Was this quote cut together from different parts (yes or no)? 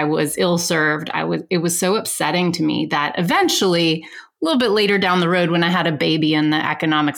no